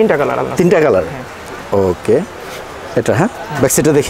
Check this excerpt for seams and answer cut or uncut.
uncut